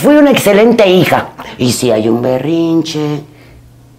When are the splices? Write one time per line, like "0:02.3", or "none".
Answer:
0:01.3